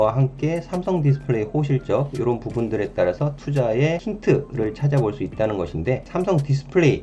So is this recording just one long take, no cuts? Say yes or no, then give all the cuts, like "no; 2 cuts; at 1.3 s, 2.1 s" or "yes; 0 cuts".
no; 2 cuts; at 4.1 s, 6.1 s